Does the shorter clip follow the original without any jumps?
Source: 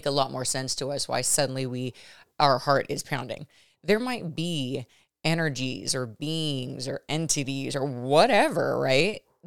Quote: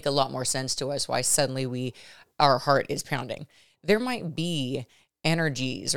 yes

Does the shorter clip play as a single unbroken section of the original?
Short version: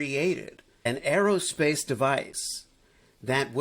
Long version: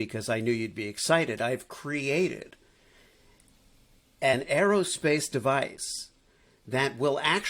no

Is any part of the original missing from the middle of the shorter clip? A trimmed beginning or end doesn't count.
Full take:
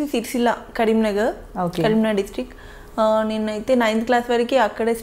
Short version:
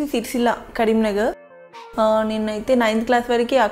yes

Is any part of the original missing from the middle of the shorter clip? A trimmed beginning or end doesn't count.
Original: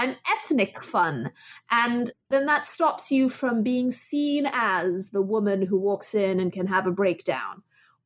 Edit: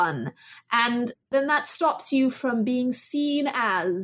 no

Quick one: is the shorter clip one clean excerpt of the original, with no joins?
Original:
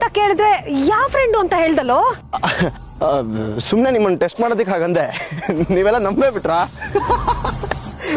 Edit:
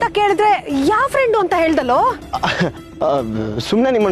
yes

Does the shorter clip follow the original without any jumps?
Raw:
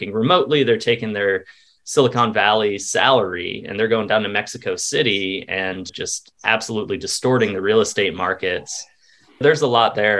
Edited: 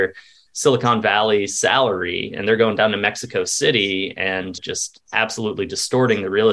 yes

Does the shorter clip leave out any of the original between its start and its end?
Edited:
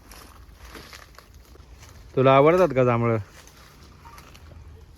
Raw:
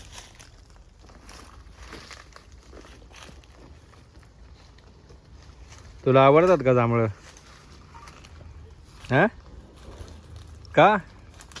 yes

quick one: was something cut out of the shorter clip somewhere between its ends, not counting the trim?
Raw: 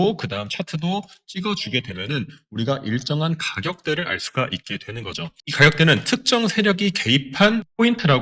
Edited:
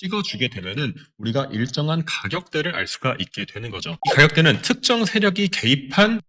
yes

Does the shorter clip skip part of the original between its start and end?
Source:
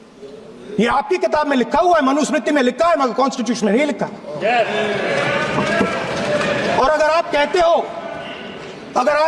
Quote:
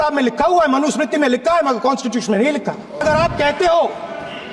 yes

